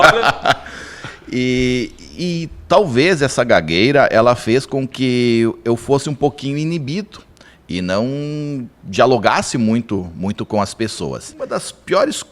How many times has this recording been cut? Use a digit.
1